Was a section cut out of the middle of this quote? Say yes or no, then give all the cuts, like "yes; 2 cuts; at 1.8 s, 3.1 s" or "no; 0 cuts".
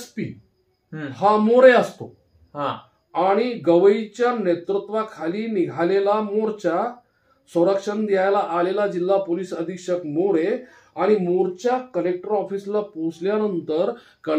no; 0 cuts